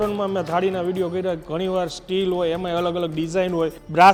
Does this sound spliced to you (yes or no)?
no